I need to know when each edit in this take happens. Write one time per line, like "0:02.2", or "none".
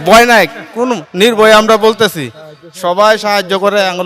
none